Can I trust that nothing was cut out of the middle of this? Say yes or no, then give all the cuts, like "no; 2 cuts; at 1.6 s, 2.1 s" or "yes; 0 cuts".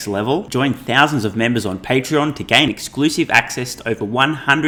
yes; 0 cuts